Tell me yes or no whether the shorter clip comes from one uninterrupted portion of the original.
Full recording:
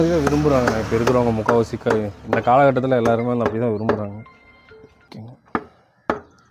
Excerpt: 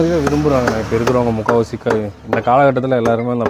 yes